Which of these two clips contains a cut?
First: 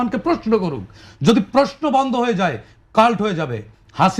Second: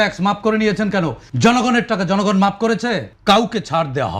second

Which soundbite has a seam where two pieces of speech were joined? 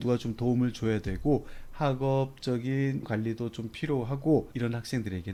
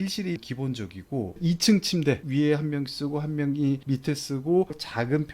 second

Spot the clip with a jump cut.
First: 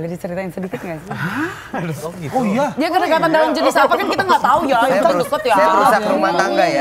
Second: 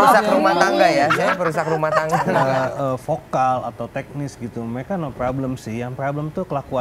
second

